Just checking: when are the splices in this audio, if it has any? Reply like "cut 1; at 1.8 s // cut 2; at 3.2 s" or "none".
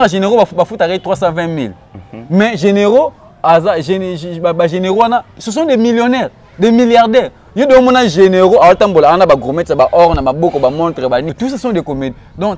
cut 1; at 11.3 s